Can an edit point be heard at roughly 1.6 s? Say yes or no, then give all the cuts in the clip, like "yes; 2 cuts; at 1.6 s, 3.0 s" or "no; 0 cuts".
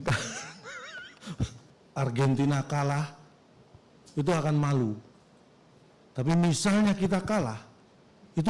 yes; 1 cut; at 1.6 s